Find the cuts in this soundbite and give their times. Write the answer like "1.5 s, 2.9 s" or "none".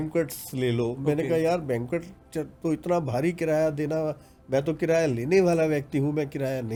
none